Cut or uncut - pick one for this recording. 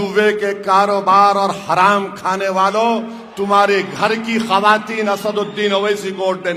uncut